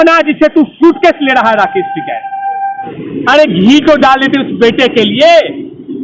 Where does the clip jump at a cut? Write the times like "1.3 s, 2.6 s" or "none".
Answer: 2.9 s